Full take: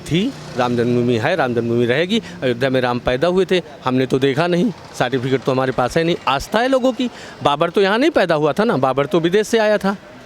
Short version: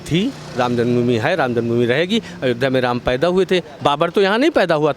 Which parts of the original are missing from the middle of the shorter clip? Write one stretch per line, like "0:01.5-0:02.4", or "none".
0:03.7-0:07.3